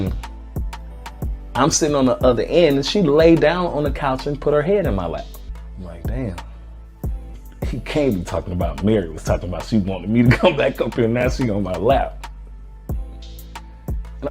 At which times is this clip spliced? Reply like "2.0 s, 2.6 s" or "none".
5.6 s, 7.3 s